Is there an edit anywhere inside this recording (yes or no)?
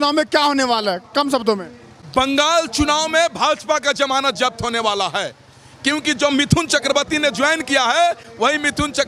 no